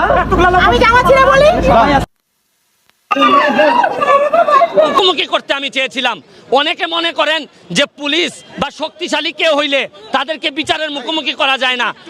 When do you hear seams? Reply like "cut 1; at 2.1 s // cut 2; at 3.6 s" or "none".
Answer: cut 1; at 4.9 s